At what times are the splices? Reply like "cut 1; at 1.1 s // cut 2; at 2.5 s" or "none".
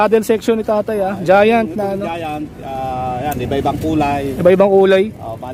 none